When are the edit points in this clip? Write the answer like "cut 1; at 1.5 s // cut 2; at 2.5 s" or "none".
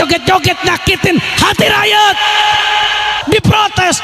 cut 1; at 3.1 s